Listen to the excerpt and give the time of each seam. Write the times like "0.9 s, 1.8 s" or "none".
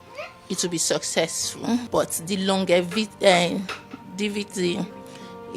1.9 s